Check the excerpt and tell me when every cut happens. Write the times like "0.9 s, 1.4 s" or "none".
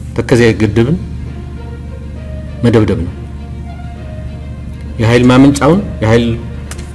none